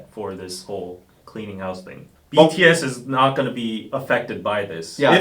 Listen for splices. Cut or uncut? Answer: cut